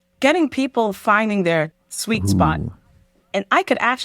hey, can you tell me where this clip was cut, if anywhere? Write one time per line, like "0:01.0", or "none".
0:01.7